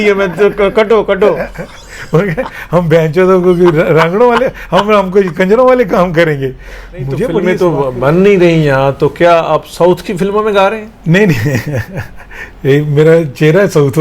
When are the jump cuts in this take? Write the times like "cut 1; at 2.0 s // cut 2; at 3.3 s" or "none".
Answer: cut 1; at 7.4 s